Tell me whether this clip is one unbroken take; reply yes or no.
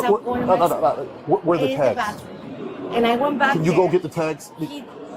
yes